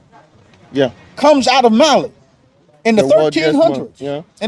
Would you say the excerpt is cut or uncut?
uncut